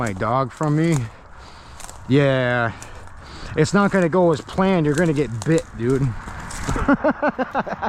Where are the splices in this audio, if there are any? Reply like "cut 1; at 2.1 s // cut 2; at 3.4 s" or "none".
none